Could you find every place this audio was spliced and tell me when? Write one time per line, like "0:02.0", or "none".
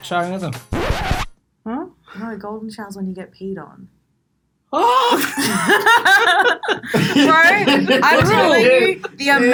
none